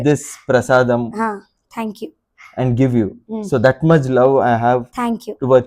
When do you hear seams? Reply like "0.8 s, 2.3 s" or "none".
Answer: none